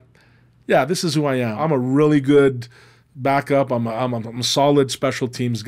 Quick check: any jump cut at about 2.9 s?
no; 1 cut; at 1.6 s

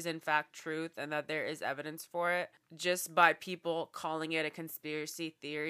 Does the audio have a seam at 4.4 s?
no; 1 cut; at 2.6 s

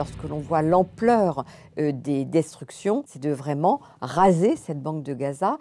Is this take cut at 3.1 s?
yes; 1 cut; at 3.1 s

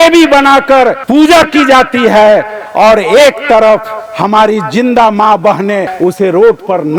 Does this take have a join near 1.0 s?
yes; 2 cuts; at 1.0 s, 5.9 s

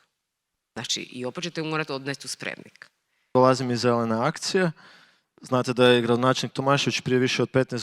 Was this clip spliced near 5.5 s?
no; 1 cut; at 3.3 s

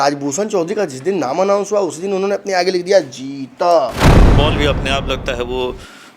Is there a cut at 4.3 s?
yes; 1 cut; at 4.3 s

